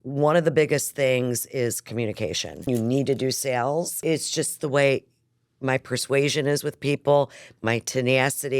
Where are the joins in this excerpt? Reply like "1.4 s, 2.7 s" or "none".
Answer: 2.6 s, 4.0 s